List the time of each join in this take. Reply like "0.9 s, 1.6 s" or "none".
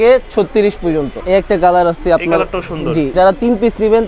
1.2 s, 3.1 s

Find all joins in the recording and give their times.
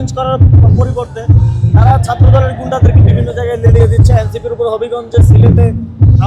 none

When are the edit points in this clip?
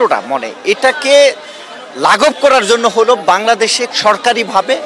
3.9 s

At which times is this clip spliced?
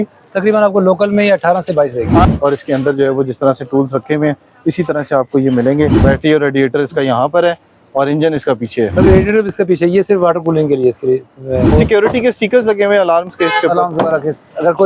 2.2 s, 6.0 s, 11.7 s

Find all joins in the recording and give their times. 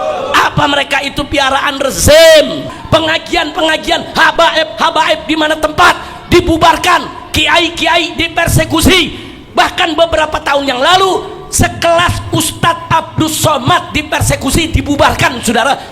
2.7 s

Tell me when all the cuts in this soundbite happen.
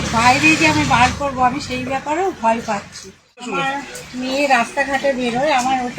3.6 s

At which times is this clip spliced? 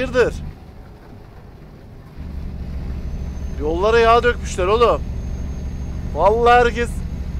none

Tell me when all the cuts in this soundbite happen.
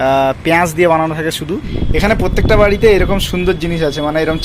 1.7 s

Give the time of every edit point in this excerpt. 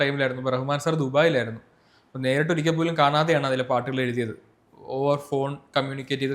none

